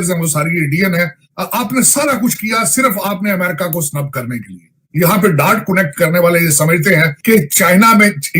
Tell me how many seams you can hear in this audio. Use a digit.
3